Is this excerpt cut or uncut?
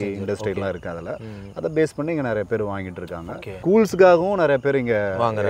uncut